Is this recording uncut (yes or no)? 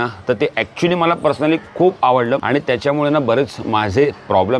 no